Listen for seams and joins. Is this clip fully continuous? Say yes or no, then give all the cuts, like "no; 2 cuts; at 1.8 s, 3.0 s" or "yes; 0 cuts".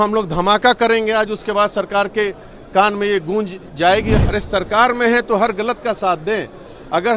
no; 1 cut; at 4.2 s